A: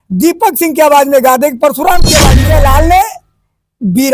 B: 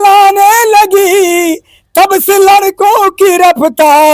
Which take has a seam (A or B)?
A